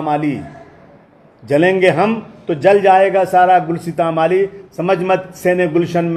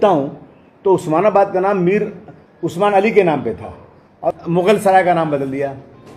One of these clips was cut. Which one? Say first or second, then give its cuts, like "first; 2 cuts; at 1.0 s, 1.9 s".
second; 1 cut; at 4.2 s